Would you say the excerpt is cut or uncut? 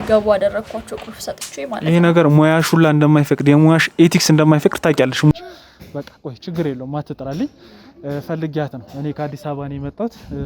cut